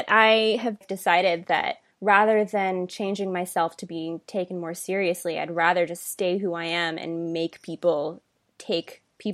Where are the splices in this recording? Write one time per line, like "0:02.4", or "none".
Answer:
0:00.8
0:01.8